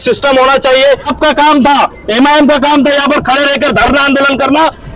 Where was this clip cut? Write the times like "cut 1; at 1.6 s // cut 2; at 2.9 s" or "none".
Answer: cut 1; at 1.1 s